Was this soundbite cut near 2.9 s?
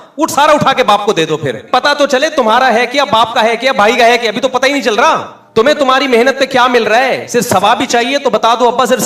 no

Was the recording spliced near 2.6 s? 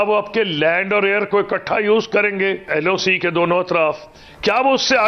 yes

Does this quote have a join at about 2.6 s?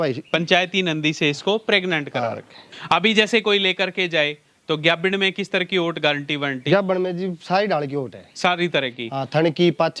yes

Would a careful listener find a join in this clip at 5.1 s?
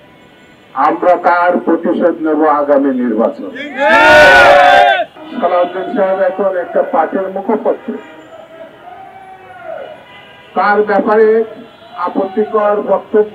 yes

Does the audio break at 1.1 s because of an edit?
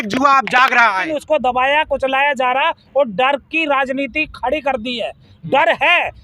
yes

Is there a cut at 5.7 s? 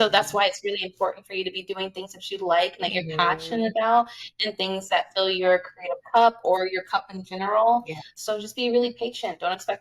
no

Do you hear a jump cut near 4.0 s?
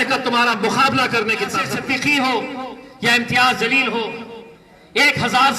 no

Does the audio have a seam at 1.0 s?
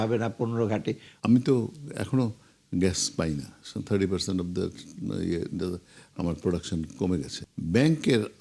yes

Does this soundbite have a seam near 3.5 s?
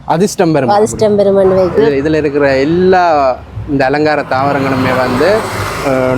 no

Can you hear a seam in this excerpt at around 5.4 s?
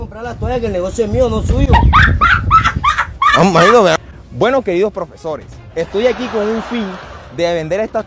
no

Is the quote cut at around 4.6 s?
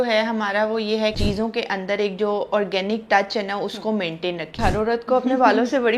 yes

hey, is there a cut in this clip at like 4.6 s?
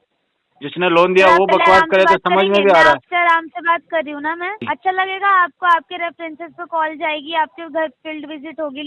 yes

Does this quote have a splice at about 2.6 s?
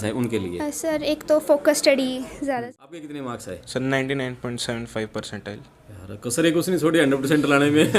yes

